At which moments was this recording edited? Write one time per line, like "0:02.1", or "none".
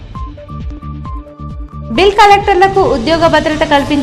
0:01.5